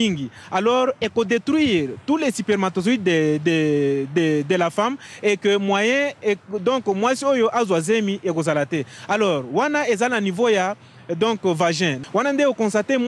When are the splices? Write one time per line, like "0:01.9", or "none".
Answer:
none